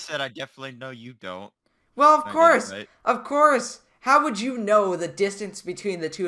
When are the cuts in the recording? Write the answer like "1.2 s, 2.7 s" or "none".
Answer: none